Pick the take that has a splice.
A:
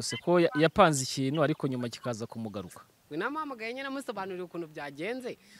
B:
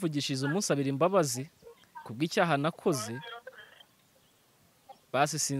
A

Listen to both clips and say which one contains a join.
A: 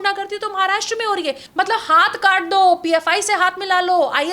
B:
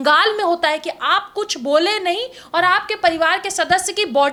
A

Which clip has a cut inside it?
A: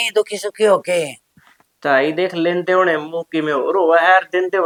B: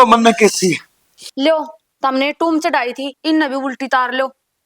B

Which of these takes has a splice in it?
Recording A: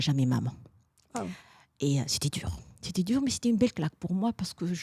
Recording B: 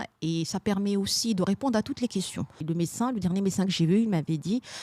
B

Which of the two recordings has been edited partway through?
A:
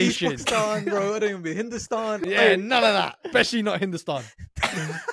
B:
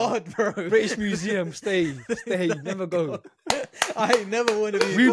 A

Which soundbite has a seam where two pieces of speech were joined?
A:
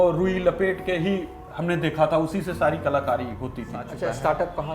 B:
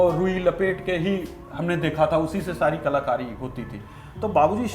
A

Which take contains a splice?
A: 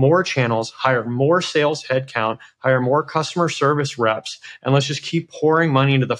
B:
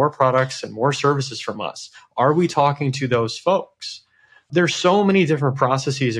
B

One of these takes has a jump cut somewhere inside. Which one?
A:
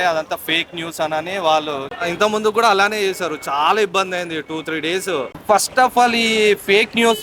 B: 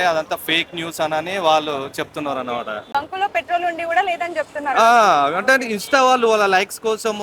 A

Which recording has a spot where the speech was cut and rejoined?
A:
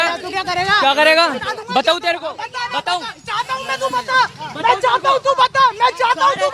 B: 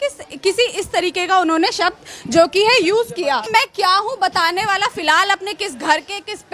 B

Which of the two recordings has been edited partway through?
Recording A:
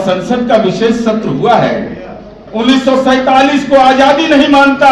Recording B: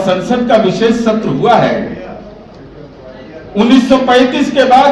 A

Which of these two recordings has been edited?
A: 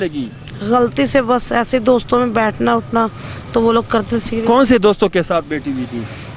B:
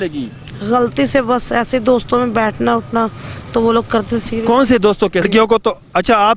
B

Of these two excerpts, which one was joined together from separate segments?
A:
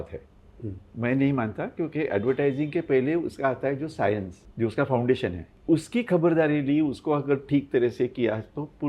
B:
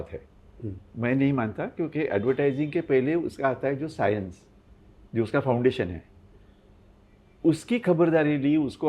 A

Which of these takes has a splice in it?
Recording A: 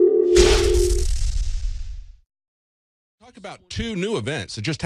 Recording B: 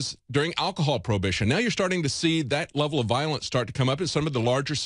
B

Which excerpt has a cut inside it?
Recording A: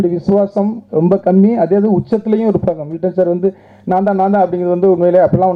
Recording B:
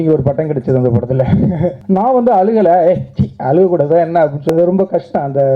B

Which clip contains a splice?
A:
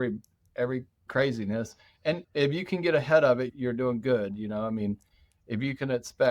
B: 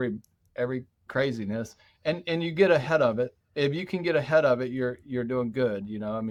A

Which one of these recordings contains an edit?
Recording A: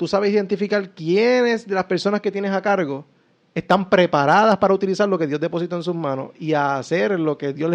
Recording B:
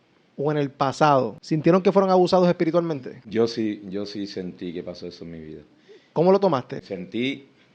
B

